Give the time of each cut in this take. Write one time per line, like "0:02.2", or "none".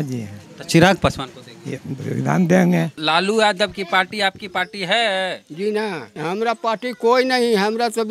0:02.9
0:06.1

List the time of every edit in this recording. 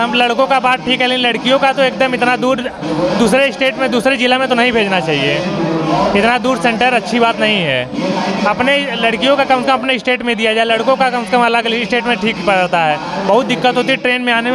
none

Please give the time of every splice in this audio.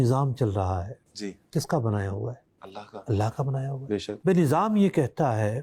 none

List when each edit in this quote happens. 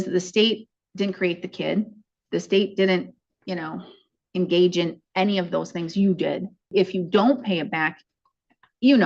0:06.7

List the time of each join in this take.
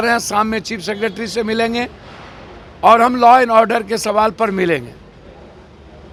none

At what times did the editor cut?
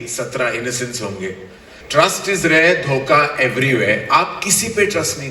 0:01.7

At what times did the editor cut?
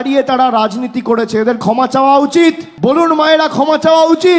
none

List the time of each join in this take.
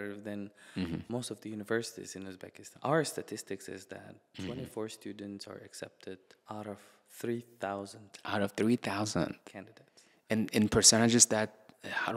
0:01.1
0:02.6
0:06.3

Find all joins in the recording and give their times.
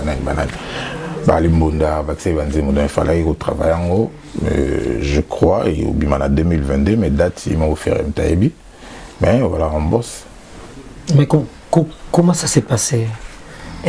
none

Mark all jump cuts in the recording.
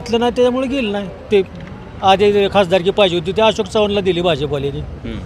none

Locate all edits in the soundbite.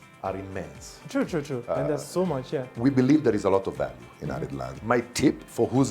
0:02.7
0:04.7

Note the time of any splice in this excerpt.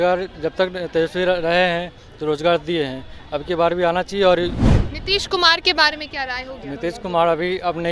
0:04.6

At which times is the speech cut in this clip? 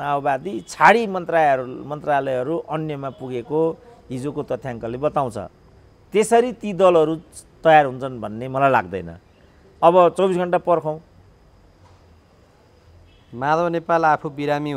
none

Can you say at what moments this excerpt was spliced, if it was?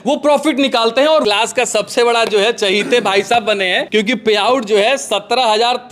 0:01.2
0:03.8

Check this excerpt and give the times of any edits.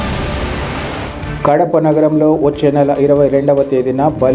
0:00.9

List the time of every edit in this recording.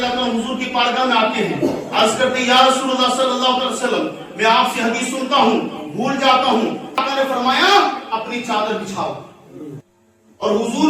0:07.0
0:09.8

